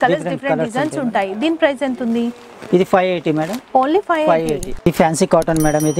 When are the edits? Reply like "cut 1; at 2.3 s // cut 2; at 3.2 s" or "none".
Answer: cut 1; at 4.7 s